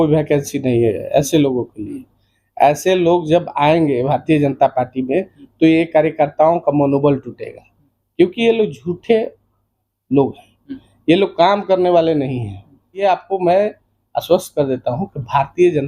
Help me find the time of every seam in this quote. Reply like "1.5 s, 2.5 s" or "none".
13.0 s